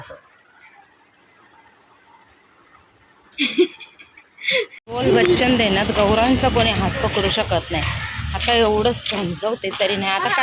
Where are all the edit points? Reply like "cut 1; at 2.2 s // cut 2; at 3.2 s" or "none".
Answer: cut 1; at 4.7 s